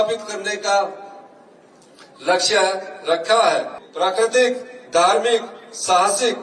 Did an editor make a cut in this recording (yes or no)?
yes